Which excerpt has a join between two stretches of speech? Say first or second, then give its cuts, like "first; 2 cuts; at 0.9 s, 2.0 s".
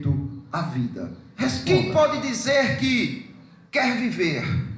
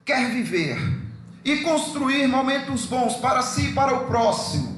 first; 1 cut; at 1.6 s